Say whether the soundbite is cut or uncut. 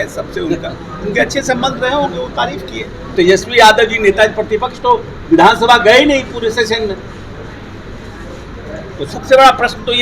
cut